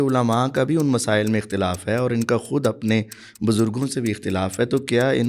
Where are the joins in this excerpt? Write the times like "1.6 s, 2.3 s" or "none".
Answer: none